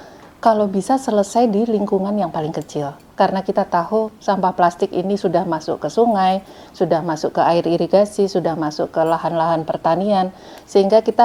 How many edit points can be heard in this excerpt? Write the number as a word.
zero